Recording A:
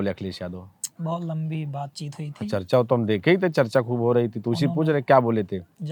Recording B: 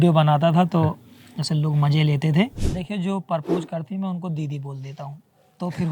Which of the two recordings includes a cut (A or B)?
B